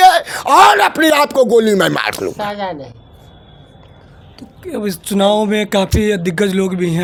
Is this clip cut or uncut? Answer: uncut